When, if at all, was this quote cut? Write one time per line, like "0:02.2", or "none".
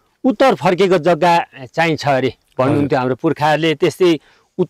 none